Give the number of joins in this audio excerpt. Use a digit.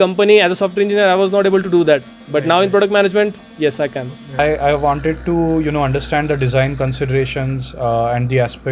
1